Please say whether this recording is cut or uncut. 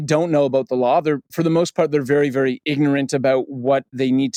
uncut